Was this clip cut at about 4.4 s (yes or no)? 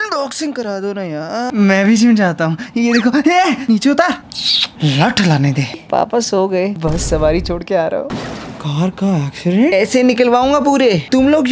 no